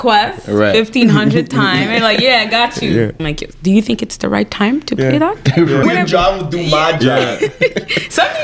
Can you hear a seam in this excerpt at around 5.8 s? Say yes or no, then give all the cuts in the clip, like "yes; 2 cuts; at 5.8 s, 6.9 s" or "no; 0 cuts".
yes; 2 cuts; at 3.2 s, 5.8 s